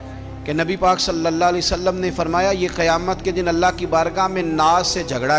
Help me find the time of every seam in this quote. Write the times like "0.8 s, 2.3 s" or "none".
none